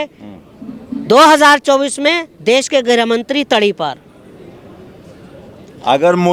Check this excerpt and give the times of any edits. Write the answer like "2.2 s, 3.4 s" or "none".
none

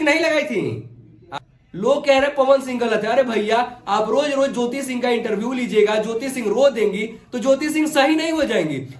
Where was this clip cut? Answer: 1.3 s

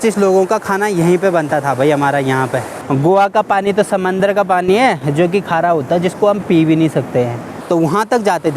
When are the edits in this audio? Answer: 2.8 s, 7.6 s

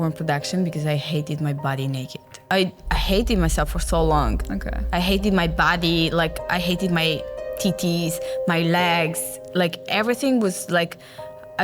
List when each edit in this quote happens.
2.4 s

